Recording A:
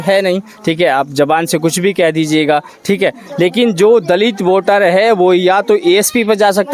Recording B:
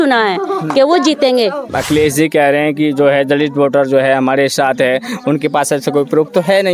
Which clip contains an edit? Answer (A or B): B